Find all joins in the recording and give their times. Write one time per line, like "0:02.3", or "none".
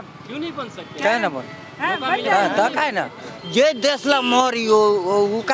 none